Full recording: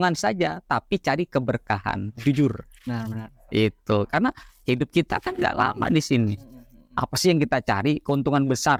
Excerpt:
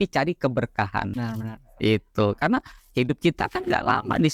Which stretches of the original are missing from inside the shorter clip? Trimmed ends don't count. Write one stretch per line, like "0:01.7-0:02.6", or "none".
0:02.1-0:02.9